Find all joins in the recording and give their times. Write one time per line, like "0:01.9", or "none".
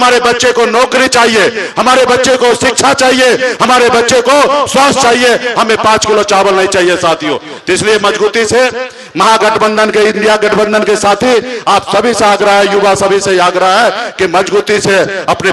none